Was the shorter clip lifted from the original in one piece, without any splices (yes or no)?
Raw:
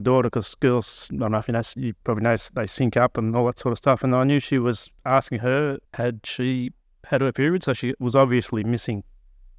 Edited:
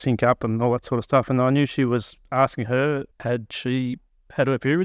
yes